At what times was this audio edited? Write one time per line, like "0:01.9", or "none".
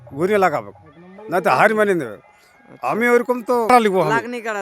0:03.7